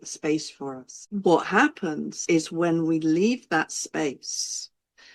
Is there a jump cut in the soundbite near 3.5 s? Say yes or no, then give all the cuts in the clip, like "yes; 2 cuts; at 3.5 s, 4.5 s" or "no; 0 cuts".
no; 2 cuts; at 1.0 s, 2.1 s